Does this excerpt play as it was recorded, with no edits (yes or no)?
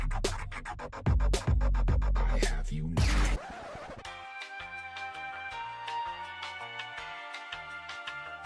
no